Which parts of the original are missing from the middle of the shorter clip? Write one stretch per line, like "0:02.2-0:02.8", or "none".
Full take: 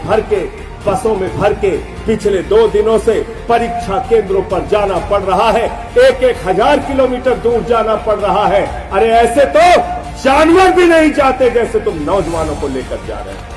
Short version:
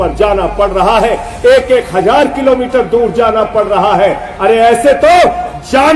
none

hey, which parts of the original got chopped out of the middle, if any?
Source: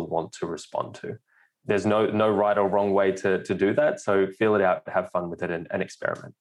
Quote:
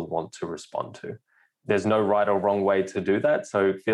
0:01.9-0:02.2
0:03.2-0:03.5

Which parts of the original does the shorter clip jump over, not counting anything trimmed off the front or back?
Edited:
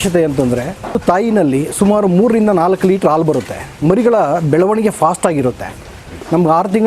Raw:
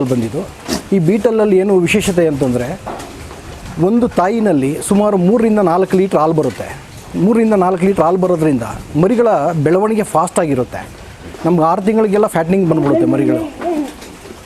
0:03.0-0:04.1
0:06.7-0:08.8

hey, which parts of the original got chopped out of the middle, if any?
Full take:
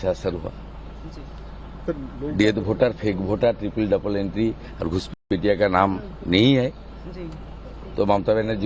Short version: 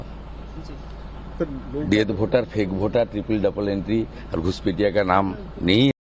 0:05.1-0:05.2

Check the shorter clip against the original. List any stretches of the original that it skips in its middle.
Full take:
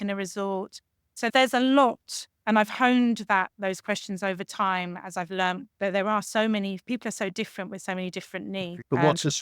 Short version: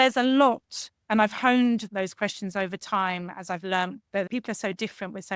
0:03.2-0:03.5
0:05.9-0:06.8

